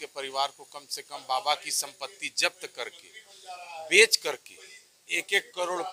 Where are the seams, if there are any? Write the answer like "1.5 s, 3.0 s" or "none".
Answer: none